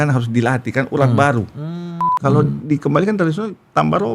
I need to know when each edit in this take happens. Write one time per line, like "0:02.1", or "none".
0:01.9